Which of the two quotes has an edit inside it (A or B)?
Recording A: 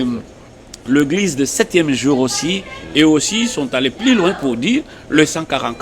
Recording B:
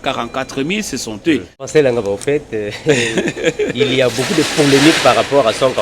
B